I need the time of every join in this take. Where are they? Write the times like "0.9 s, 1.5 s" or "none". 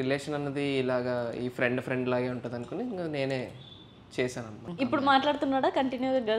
4.7 s